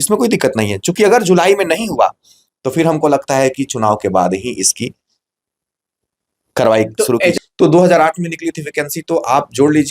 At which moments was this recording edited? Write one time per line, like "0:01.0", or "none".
0:07.3